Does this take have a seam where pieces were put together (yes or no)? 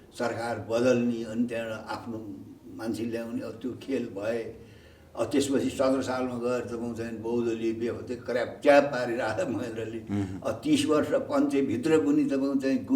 no